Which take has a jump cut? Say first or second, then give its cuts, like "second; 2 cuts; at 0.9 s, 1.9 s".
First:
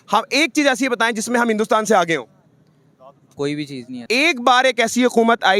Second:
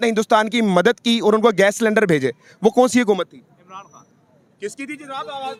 first; 1 cut; at 3.9 s